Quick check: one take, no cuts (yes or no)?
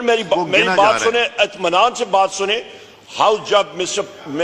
yes